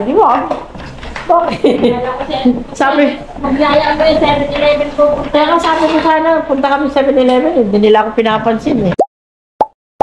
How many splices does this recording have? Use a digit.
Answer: 1